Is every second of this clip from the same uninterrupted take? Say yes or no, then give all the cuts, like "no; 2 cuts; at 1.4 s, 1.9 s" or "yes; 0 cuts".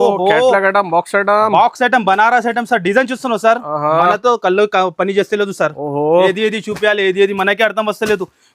yes; 0 cuts